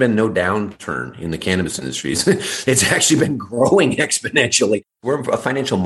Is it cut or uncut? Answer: cut